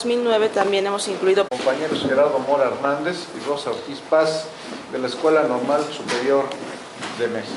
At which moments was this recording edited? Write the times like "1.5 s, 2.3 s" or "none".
none